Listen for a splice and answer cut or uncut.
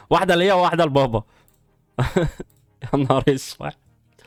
uncut